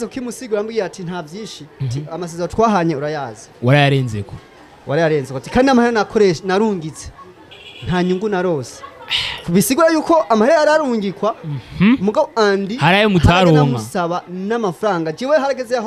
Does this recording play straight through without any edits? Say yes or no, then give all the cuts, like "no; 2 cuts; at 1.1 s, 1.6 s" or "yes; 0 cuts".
yes; 0 cuts